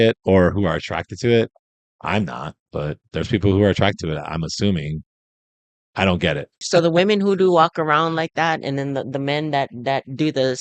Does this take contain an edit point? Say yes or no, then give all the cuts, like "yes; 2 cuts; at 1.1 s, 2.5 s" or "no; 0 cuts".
yes; 1 cut; at 6.6 s